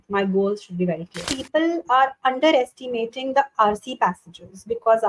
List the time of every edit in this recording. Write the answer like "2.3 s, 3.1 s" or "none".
1.3 s